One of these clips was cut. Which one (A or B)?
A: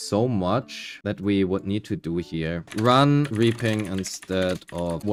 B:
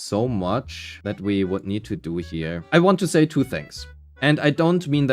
B